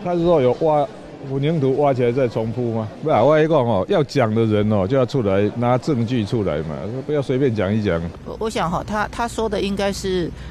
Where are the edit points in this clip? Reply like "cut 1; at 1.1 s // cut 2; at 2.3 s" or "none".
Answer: cut 1; at 2.9 s // cut 2; at 8.2 s